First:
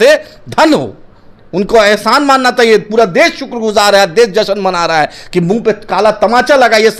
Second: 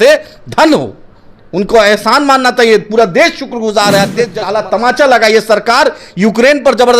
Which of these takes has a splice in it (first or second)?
second